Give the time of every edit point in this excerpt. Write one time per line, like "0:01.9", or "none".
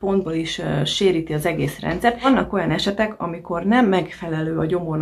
0:02.2